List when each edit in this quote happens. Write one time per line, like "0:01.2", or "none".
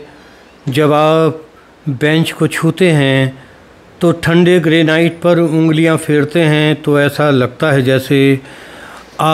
none